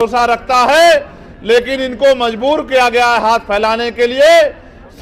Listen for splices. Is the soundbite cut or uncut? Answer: uncut